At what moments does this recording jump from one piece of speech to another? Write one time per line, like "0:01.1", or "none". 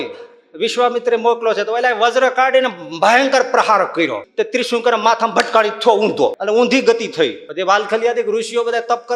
0:04.2
0:06.4
0:07.4